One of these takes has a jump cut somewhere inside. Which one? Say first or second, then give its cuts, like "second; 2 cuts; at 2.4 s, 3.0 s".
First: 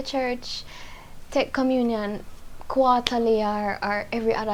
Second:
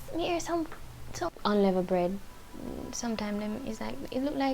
second; 1 cut; at 1.3 s